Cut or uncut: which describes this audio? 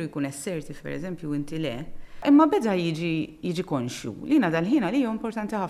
cut